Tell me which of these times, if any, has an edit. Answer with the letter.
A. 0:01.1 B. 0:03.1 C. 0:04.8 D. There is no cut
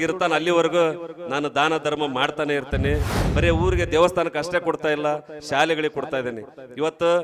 B